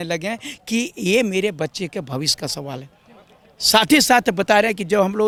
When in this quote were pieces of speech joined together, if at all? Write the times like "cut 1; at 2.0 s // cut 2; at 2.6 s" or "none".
none